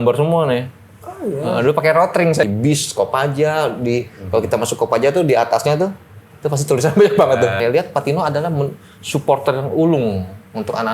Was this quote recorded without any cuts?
no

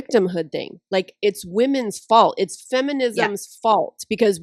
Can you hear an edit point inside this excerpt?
no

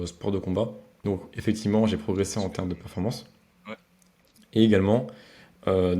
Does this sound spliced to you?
yes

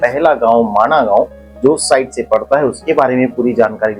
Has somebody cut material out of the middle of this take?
no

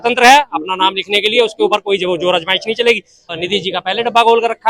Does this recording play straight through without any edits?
no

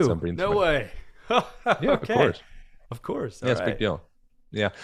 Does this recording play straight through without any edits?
yes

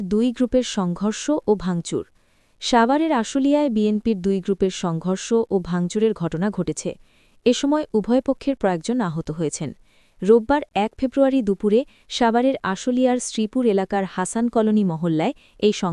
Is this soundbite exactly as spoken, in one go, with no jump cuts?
yes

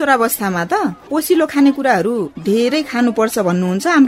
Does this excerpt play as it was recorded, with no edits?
no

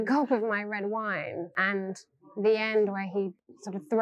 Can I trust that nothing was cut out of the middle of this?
no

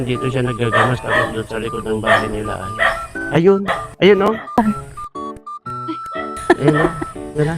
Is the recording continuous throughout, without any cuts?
no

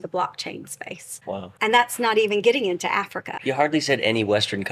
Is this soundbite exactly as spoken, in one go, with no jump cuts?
no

